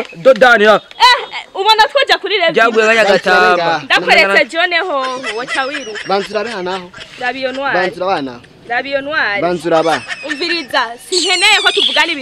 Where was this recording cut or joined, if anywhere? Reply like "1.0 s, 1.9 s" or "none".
none